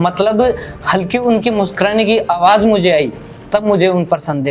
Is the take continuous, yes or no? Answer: yes